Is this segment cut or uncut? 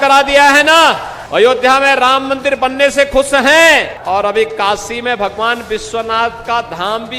cut